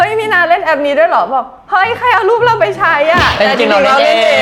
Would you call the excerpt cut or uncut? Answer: uncut